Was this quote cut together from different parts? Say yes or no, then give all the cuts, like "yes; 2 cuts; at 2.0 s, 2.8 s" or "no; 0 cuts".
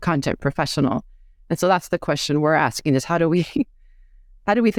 no; 0 cuts